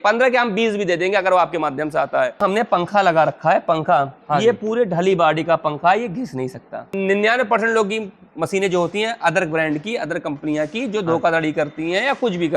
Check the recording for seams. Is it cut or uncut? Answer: cut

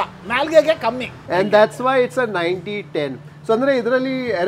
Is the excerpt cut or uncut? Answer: uncut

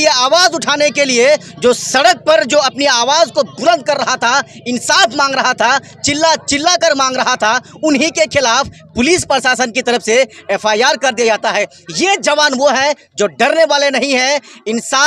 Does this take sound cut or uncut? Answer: uncut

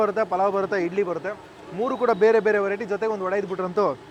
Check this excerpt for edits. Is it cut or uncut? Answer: uncut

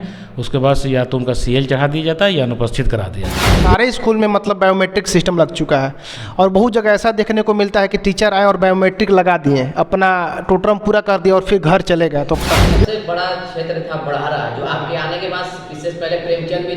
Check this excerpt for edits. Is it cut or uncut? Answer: cut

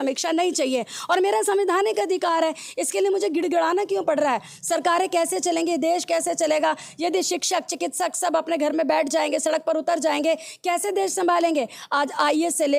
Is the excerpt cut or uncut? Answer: uncut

